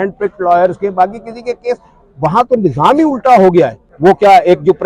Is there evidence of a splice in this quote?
yes; 1 cut; at 3.8 s

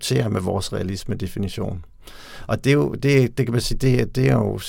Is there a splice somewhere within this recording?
no; 0 cuts

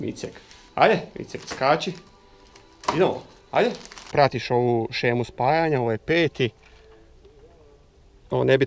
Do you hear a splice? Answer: yes; 1 cut; at 4.1 s

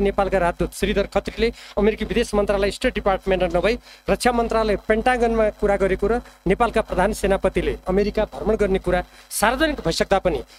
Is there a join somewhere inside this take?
no; 0 cuts

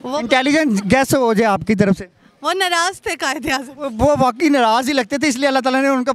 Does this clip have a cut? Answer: yes; 1 cut; at 4.1 s

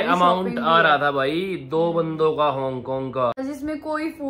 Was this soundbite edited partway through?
yes; 1 cut; at 3.4 s

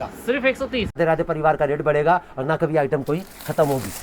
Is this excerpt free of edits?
no; 1 cut; at 1.0 s

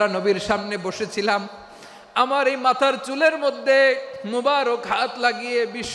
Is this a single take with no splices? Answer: yes; 0 cuts

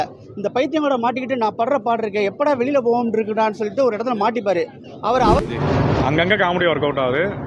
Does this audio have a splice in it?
yes; 1 cut; at 5.5 s

